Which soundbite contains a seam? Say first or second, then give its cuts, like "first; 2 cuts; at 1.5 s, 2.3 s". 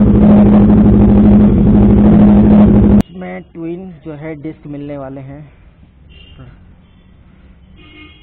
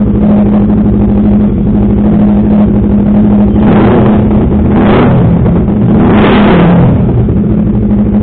first; 1 cut; at 3.0 s